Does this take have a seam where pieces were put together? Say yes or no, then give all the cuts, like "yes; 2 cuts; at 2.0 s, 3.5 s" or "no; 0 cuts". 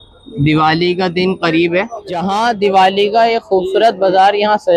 no; 0 cuts